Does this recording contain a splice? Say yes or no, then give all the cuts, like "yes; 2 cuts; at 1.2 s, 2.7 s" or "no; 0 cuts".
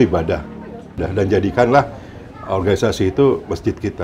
yes; 1 cut; at 1.0 s